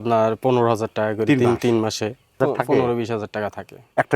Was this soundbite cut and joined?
yes; 1 cut; at 2.3 s

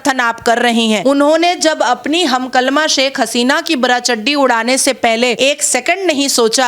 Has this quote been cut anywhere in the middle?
yes; 2 cuts; at 1.0 s, 5.3 s

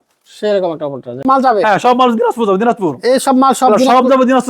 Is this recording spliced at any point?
yes; 1 cut; at 1.2 s

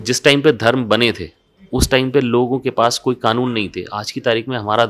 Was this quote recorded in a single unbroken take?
yes; 0 cuts

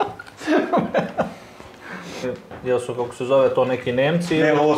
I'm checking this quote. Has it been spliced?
yes; 1 cut; at 2.3 s

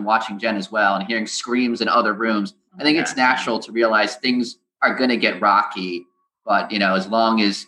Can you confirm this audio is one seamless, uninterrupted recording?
yes; 0 cuts

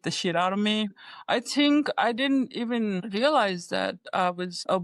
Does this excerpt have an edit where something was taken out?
no; 0 cuts

